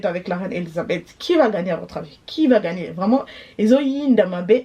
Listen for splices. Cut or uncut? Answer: uncut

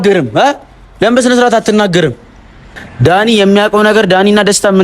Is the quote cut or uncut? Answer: cut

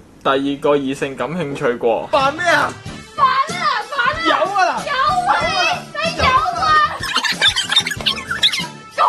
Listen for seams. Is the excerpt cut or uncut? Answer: cut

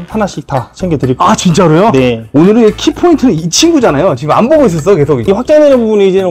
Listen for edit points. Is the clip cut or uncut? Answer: cut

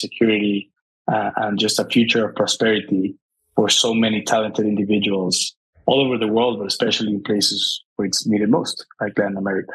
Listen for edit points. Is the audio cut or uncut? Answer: uncut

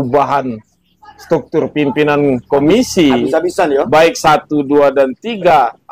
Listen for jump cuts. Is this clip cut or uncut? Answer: uncut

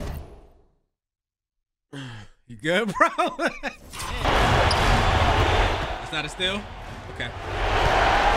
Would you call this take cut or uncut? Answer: cut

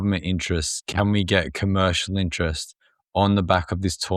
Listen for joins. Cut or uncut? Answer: uncut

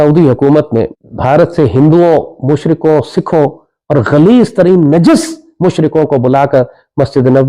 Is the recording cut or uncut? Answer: cut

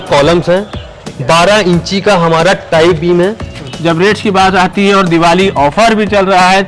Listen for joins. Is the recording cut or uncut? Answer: cut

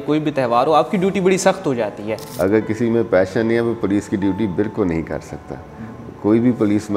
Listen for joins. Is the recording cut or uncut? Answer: cut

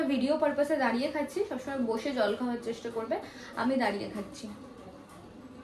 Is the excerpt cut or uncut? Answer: uncut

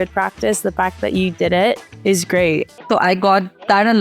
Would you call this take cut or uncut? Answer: cut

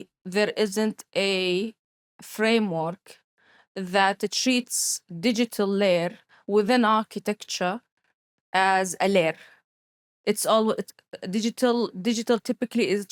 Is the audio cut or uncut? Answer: uncut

